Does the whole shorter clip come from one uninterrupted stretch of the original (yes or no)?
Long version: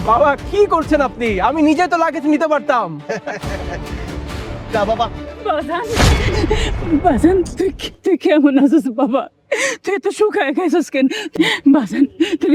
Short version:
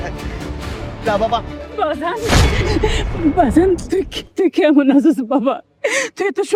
yes